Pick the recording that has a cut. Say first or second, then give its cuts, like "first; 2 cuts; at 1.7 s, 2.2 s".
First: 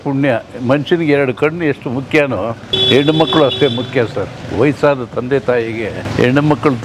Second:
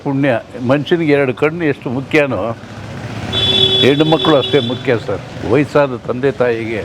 first; 2 cuts; at 2.7 s, 6.0 s